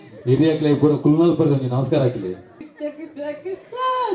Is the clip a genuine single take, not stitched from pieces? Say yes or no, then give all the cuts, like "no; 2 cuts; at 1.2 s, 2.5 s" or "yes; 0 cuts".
no; 1 cut; at 2.7 s